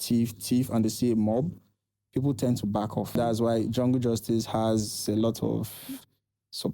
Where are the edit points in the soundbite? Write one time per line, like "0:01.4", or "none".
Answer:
0:03.1